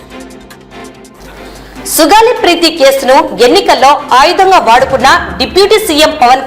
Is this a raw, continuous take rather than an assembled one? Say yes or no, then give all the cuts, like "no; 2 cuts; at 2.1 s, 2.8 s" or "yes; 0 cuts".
no; 1 cut; at 1.2 s